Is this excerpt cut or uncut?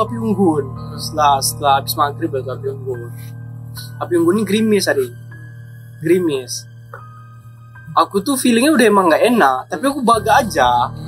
uncut